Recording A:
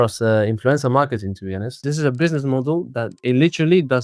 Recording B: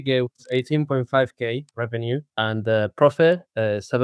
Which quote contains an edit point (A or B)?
A